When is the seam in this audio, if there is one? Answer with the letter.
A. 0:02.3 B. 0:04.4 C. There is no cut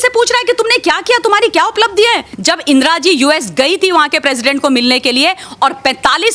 A